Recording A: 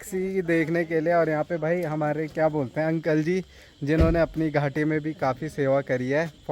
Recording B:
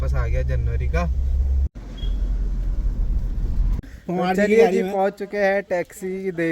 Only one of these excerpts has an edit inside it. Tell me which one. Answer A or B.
B